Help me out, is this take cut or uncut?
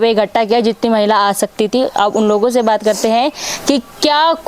uncut